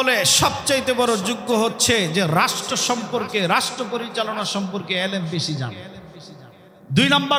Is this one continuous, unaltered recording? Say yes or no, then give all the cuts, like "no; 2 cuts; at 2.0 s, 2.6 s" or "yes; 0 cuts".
yes; 0 cuts